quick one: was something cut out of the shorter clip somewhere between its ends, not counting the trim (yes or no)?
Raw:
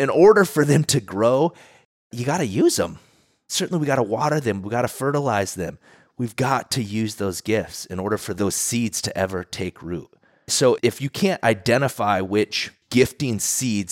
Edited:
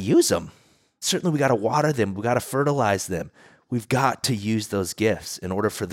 no